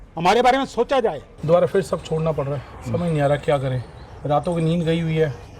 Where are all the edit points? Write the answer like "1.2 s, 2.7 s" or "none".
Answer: 1.3 s